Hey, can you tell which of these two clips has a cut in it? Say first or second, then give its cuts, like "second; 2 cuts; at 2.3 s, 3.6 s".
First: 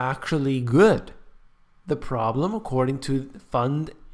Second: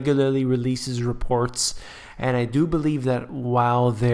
second; 1 cut; at 2.7 s